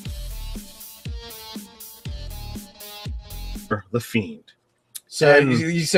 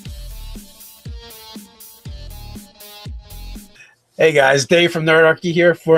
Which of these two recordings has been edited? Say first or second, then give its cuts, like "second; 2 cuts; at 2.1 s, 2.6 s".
second; 1 cut; at 3.6 s